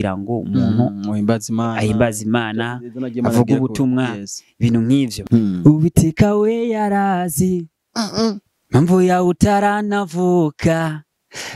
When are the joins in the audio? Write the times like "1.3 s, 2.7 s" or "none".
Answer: 5.2 s

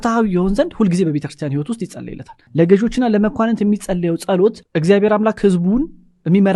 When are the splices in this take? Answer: none

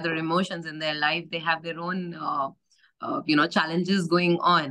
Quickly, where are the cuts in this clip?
none

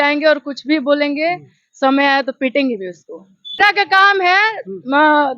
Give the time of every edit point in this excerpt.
3.6 s

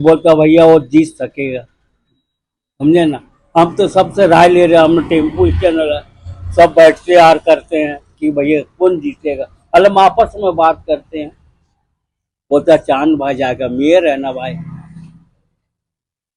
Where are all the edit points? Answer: none

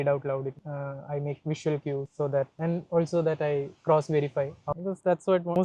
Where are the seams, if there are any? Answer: 4.7 s

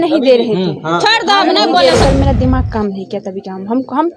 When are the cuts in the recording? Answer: 2.0 s

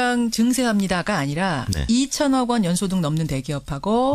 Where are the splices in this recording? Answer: 1.9 s

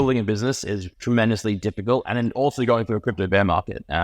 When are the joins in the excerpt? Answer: 0.9 s, 2.1 s

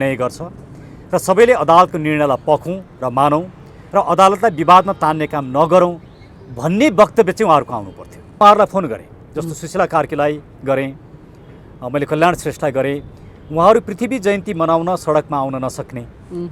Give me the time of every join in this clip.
8.4 s

